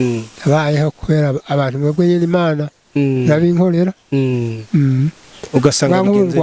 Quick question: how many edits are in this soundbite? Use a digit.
0